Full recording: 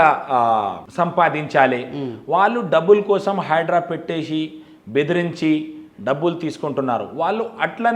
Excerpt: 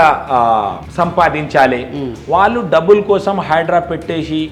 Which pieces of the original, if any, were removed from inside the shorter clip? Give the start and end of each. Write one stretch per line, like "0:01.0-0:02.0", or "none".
none